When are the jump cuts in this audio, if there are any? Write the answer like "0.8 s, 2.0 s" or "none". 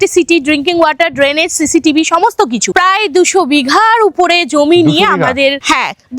2.7 s